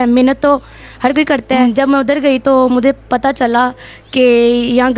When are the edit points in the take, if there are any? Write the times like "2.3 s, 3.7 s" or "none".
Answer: 1.6 s